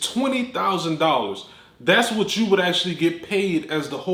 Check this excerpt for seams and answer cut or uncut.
uncut